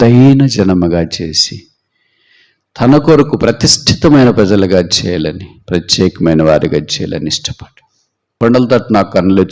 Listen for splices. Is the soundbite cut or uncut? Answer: cut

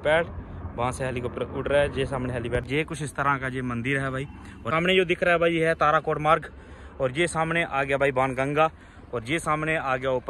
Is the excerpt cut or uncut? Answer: cut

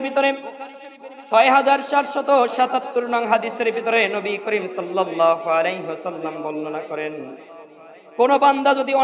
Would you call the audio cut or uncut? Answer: uncut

